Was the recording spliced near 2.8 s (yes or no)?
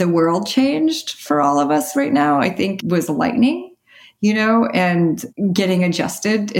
yes